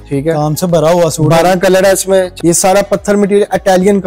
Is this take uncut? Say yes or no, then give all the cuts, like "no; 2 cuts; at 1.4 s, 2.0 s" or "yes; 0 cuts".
no; 1 cut; at 2.3 s